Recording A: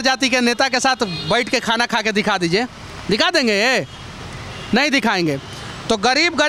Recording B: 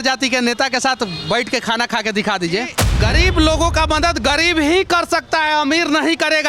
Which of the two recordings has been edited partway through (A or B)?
B